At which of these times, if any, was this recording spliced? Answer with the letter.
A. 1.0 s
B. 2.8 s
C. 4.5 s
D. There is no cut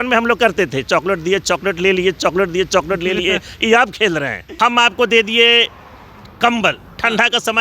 C